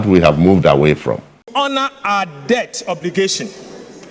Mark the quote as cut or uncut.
cut